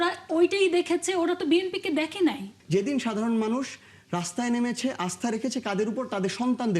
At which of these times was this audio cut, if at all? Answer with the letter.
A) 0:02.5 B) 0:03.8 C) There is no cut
A